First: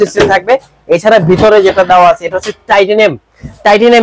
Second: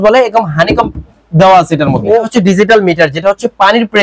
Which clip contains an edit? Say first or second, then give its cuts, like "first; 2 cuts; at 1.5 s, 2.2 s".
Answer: second; 1 cut; at 2.3 s